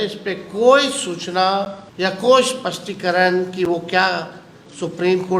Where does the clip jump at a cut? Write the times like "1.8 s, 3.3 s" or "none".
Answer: 1.8 s